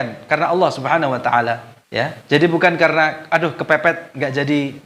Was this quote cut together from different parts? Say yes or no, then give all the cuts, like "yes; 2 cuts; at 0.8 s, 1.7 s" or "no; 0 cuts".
yes; 1 cut; at 1.8 s